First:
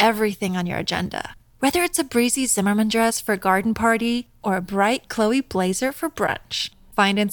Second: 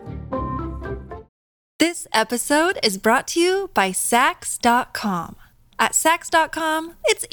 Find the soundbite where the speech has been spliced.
second; 1 cut; at 1.2 s

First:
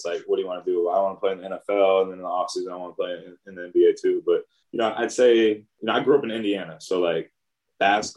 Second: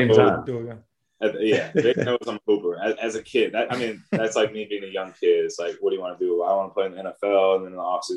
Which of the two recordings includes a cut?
first; 2 cuts; at 4.6 s, 5.7 s

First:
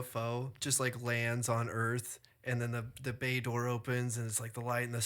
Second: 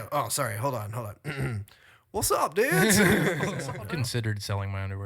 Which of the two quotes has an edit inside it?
second; 1 cut; at 3.6 s

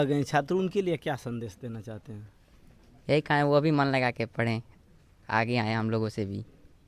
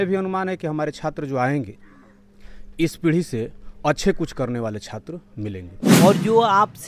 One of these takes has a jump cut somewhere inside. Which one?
second; 1 cut; at 5.7 s

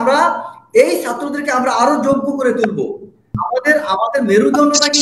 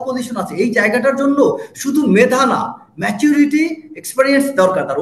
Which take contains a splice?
first; 1 cut; at 3.4 s

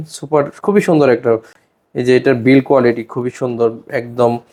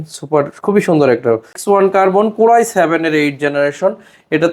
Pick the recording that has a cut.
second; 1 cut; at 1.6 s

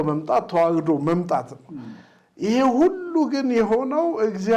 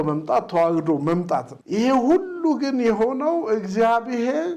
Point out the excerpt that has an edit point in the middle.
second; 1 cut; at 1.6 s

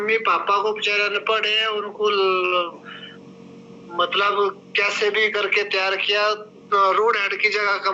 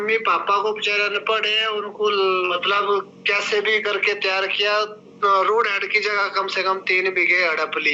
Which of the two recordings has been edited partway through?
second; 1 cut; at 2.5 s

